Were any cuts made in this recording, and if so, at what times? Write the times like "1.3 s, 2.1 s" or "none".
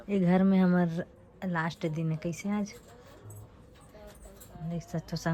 none